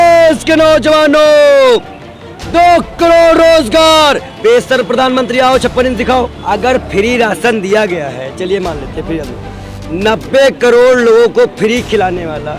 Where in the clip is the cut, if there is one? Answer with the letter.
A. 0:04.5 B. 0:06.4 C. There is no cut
B